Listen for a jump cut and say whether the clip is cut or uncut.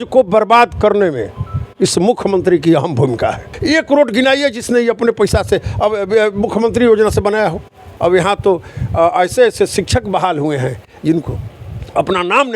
cut